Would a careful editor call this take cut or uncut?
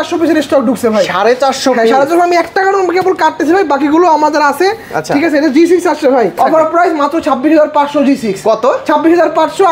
cut